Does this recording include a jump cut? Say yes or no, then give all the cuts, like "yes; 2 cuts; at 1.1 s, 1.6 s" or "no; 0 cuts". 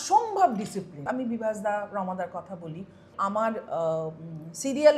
yes; 2 cuts; at 1.1 s, 3.1 s